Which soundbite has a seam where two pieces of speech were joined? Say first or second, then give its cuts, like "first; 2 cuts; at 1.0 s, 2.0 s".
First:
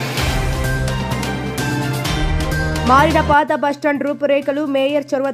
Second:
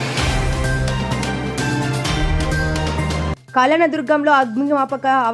second; 1 cut; at 2.8 s